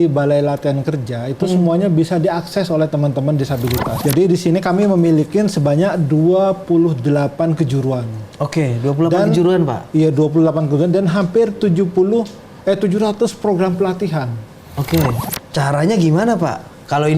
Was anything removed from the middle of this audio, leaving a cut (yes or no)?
yes